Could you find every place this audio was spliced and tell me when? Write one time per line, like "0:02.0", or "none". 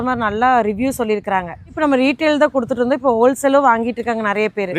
0:01.8